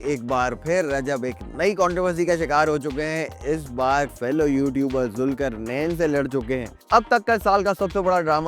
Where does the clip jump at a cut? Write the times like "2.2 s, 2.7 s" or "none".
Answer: 4.2 s, 6.7 s